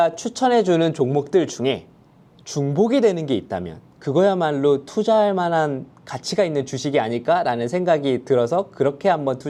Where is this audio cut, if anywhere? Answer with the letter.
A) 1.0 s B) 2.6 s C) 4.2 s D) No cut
D